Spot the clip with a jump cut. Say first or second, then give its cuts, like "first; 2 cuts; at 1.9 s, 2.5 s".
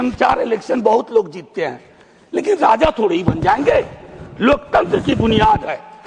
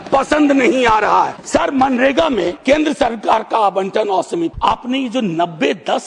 second; 3 cuts; at 1.4 s, 2.6 s, 4.5 s